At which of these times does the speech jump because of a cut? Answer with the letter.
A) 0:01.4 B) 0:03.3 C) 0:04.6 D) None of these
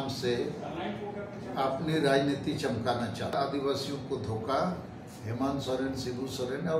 B